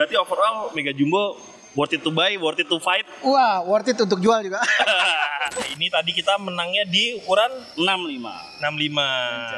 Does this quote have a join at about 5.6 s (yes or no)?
yes